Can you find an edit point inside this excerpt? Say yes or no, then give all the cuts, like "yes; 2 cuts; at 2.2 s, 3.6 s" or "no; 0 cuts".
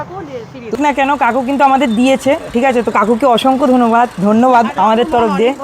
yes; 2 cuts; at 0.8 s, 4.7 s